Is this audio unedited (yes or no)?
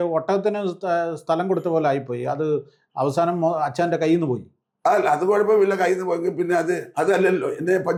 yes